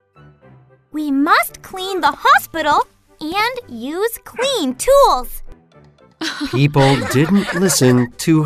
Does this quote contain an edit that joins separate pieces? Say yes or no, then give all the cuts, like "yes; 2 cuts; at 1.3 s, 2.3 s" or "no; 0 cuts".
yes; 1 cut; at 0.9 s